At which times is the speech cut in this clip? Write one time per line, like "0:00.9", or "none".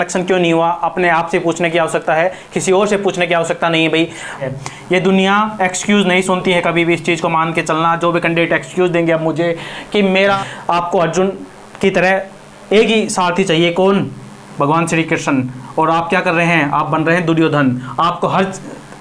0:04.5
0:10.4